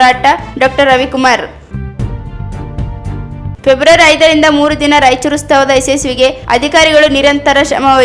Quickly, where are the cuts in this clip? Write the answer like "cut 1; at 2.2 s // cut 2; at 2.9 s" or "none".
cut 1; at 1.6 s // cut 2; at 3.5 s